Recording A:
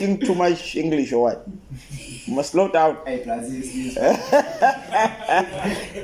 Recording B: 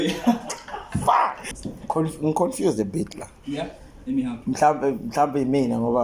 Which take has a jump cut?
B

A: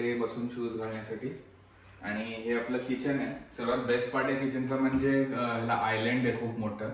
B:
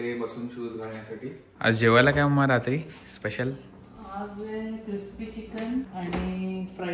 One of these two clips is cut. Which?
B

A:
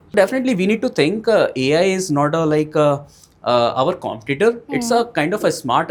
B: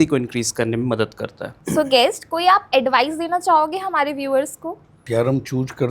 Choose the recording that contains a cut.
B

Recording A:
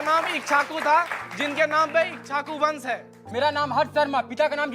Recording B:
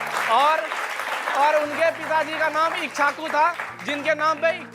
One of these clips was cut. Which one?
A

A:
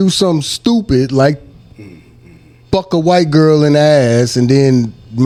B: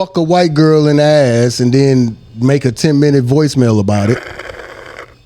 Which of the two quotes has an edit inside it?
B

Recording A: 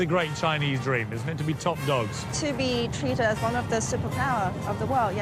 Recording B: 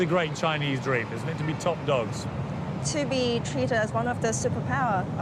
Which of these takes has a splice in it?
A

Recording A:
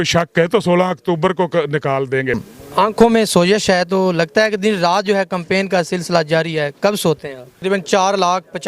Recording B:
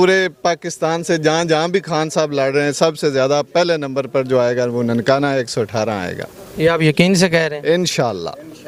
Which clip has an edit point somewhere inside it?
A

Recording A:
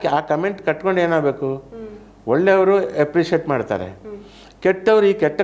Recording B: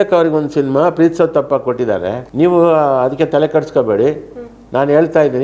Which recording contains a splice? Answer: B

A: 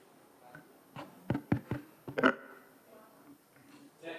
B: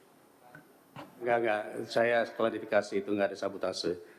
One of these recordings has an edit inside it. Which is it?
B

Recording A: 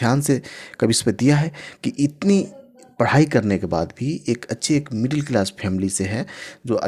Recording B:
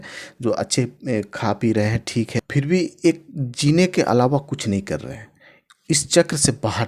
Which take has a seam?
B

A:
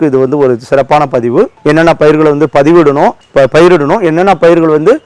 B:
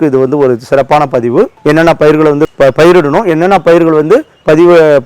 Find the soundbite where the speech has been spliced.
B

